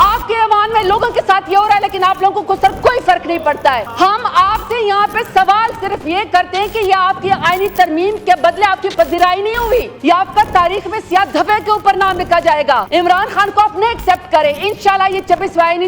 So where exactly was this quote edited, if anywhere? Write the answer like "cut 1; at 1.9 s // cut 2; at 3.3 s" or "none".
cut 1; at 3.9 s // cut 2; at 9.9 s // cut 3; at 12.8 s